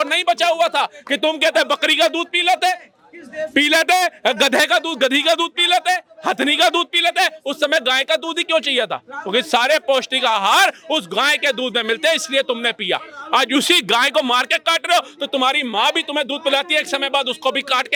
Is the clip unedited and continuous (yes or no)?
yes